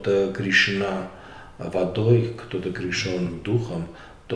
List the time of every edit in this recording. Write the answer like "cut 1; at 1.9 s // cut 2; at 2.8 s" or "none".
none